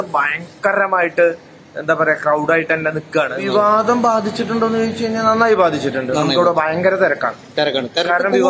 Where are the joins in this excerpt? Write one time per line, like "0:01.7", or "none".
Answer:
0:03.3

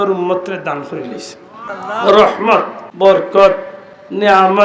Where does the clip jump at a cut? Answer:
0:01.7
0:02.8

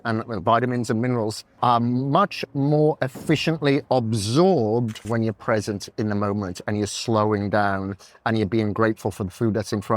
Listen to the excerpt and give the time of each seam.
0:01.4
0:05.0

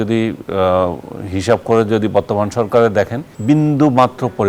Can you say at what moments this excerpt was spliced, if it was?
0:03.3

